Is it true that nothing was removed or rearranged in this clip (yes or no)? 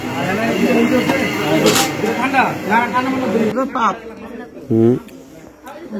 no